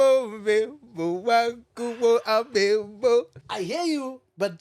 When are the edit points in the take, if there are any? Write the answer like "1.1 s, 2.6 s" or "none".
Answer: 3.4 s